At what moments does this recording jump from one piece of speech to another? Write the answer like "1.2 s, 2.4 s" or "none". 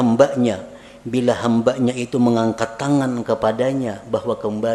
none

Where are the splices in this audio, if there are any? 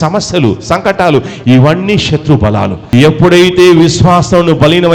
2.9 s

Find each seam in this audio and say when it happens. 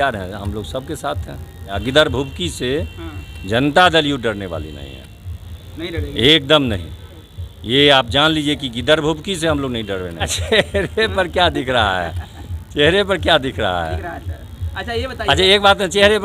1.7 s, 10.4 s

